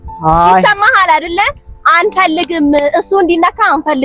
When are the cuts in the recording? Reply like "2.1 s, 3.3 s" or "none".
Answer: none

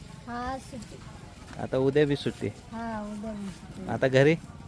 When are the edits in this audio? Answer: none

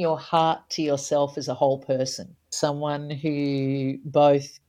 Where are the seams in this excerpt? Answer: 2.4 s

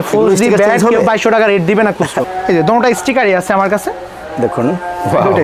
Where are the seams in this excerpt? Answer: 2.3 s

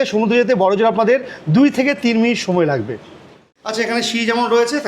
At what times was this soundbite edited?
3.5 s

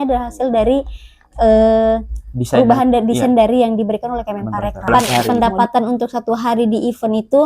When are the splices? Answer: 4.9 s

